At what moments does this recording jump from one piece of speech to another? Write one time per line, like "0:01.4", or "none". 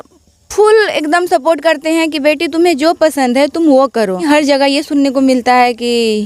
0:04.2